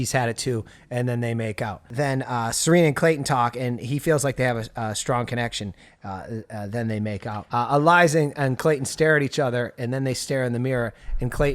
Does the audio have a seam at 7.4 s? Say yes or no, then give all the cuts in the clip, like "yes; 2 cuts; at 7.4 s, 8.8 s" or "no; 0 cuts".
yes; 2 cuts; at 1.9 s, 7.4 s